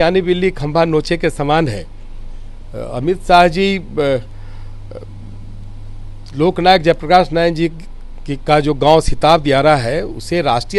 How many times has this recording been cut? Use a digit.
0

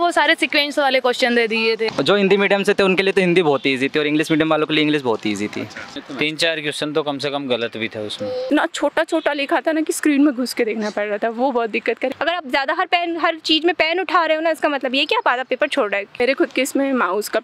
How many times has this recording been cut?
5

